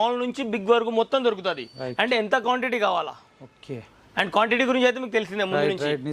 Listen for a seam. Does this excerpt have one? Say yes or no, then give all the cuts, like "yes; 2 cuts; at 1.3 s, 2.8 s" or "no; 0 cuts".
no; 0 cuts